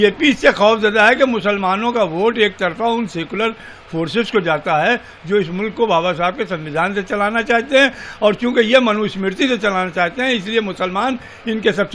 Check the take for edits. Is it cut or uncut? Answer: uncut